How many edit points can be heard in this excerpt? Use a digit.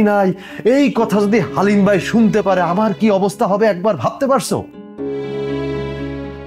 1